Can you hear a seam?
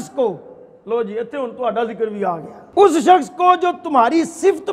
yes; 1 cut; at 2.5 s

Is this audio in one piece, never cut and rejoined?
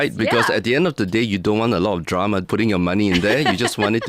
no; 1 cut; at 2.4 s

